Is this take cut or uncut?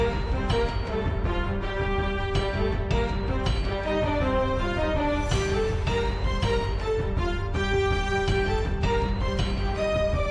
uncut